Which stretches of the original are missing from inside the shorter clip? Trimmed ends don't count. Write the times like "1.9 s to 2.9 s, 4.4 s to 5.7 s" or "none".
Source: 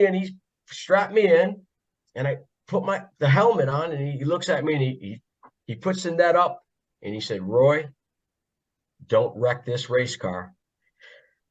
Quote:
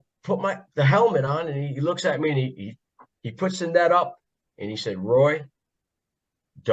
none